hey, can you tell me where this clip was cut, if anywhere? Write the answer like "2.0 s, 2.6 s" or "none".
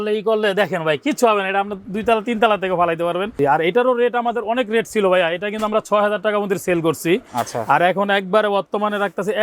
3.4 s